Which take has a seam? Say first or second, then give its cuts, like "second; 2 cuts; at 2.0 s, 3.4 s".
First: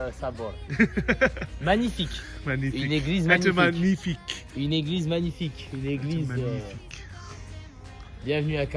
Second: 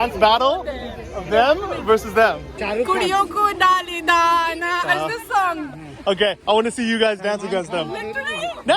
second; 1 cut; at 2.5 s